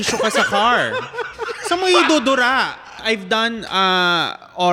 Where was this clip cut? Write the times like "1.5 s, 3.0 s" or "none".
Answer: 2.9 s